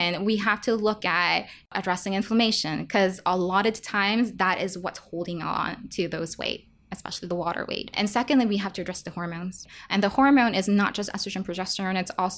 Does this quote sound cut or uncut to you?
cut